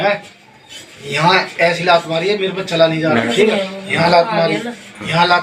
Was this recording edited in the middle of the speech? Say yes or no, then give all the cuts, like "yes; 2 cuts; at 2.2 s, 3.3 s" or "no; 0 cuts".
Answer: yes; 1 cut; at 3.3 s